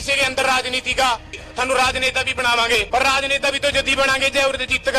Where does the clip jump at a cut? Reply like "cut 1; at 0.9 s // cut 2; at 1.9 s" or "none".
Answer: cut 1; at 1.3 s // cut 2; at 2.9 s